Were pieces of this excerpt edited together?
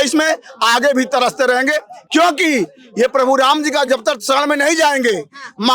no; 0 cuts

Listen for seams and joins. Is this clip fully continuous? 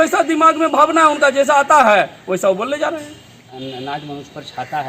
no; 1 cut; at 3.5 s

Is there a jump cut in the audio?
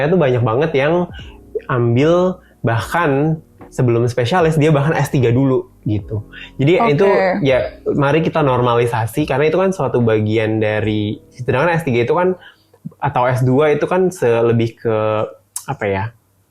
no; 0 cuts

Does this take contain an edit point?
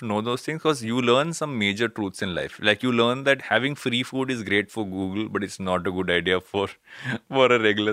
yes; 1 cut; at 3.4 s

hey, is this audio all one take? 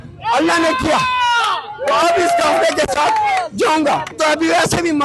no; 1 cut; at 4.1 s

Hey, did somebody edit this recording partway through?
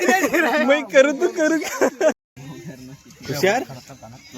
yes; 1 cut; at 2.2 s

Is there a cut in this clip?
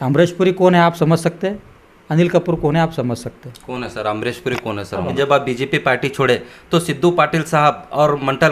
yes; 1 cut; at 5.1 s

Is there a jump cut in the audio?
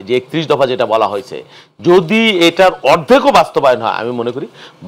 no; 0 cuts

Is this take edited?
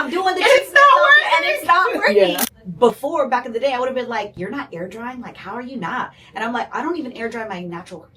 yes; 1 cut; at 2.5 s

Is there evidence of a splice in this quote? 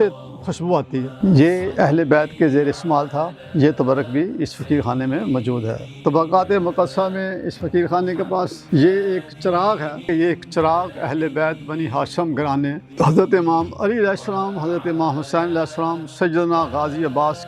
yes; 6 cuts; at 1.1 s, 3.4 s, 5.8 s, 8.6 s, 10.0 s, 12.8 s

